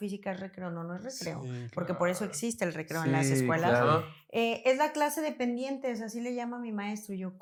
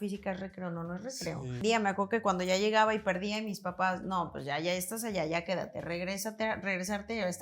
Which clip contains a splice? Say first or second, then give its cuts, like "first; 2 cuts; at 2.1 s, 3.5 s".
second; 1 cut; at 1.6 s